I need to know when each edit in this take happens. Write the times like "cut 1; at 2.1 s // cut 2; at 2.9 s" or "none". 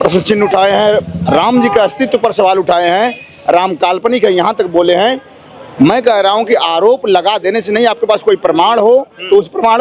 none

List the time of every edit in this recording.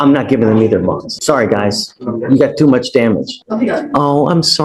cut 1; at 1.1 s // cut 2; at 3.4 s

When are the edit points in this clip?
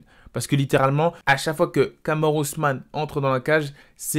cut 1; at 1.2 s

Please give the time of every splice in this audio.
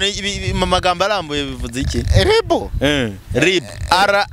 none

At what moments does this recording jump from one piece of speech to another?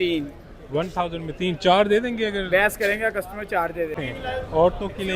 cut 1; at 4.0 s

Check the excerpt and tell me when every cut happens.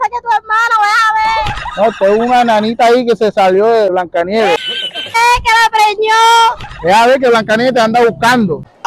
cut 1; at 3.9 s // cut 2; at 5.1 s

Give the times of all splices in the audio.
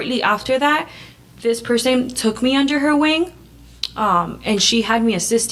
none

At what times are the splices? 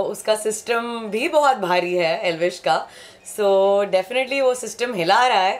none

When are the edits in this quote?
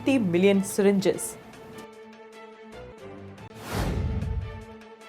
cut 1; at 1.7 s // cut 2; at 3.4 s

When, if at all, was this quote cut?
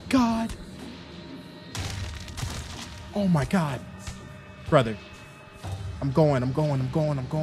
none

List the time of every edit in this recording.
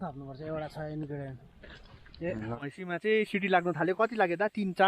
cut 1; at 2.5 s

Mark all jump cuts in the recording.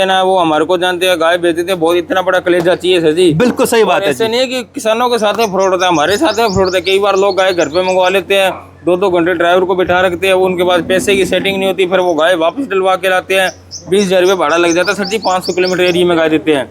none

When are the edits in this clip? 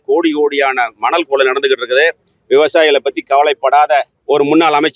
none

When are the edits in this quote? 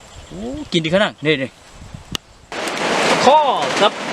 cut 1; at 2.6 s

